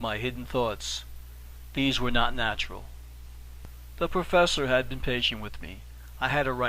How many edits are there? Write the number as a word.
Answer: one